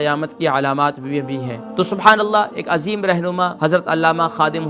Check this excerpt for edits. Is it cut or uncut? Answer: cut